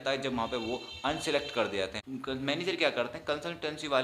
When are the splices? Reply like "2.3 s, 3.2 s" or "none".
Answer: 2.1 s